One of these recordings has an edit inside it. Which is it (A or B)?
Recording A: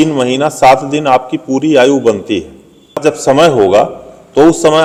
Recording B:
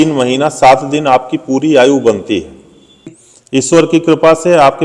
B